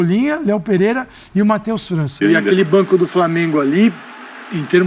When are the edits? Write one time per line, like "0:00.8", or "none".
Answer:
0:02.2